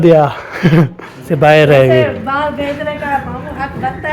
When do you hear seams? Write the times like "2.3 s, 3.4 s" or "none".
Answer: 1.3 s